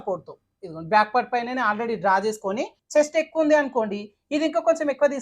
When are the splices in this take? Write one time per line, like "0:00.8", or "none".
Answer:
0:02.8